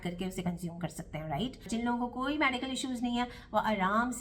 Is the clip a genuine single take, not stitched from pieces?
no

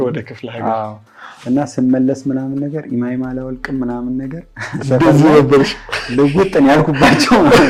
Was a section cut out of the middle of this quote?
no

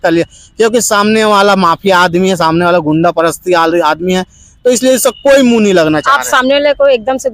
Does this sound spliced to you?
no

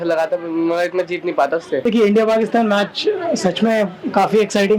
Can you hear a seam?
yes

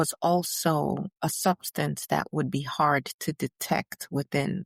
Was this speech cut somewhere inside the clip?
no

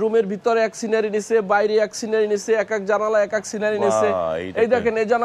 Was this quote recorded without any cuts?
yes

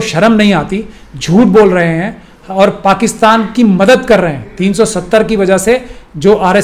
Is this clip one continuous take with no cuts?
yes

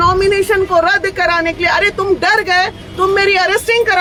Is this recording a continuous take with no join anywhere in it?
yes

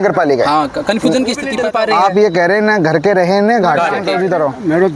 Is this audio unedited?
no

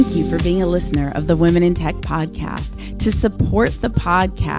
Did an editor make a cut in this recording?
no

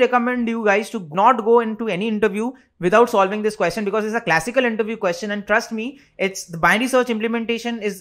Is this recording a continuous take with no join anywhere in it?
yes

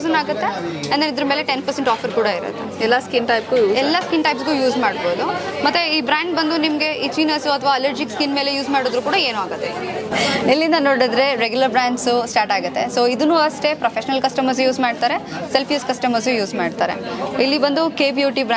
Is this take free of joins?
yes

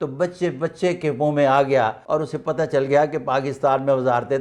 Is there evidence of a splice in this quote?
yes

